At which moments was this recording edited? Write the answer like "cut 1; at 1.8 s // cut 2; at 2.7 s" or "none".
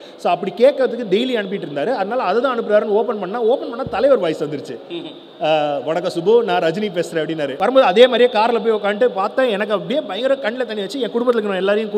cut 1; at 7.5 s